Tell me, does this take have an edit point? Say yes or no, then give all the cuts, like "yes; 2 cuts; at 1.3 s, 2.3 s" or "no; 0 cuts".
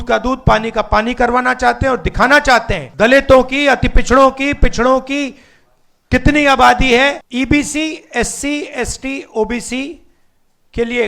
yes; 2 cuts; at 2.8 s, 7.2 s